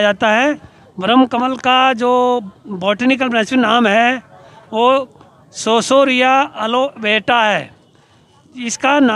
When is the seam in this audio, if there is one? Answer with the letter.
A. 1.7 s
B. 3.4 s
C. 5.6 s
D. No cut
D